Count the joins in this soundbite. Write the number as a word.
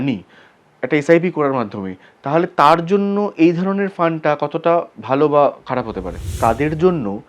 one